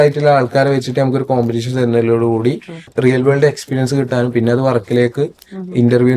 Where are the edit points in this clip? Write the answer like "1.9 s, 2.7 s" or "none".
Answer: 2.9 s